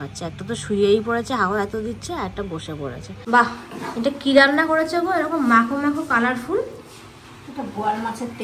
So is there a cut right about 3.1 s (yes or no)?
yes